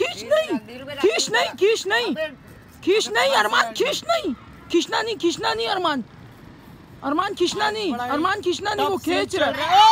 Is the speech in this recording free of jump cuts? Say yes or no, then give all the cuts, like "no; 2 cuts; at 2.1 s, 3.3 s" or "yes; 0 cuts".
yes; 0 cuts